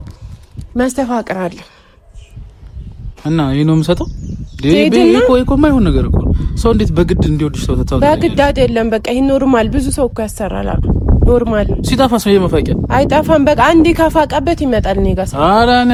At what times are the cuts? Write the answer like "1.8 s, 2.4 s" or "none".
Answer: none